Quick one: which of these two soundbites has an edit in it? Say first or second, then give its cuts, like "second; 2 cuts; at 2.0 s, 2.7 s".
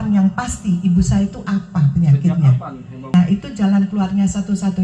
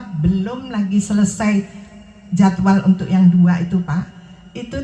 first; 1 cut; at 3.1 s